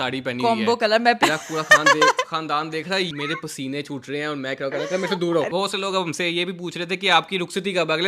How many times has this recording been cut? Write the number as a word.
three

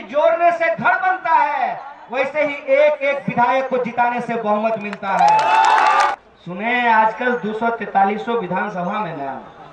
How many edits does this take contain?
one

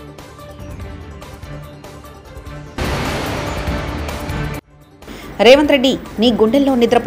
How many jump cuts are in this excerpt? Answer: zero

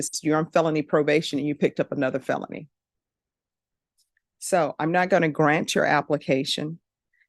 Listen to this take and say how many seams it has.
one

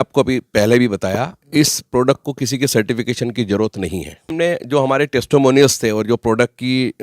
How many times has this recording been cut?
one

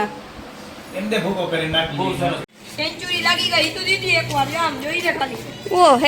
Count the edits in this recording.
one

